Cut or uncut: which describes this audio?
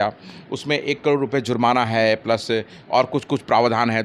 uncut